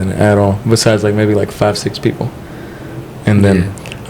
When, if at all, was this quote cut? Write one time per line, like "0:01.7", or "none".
none